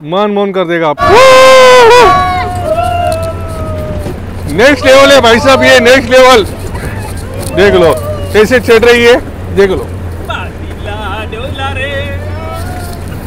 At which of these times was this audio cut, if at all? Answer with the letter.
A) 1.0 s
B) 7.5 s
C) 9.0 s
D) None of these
A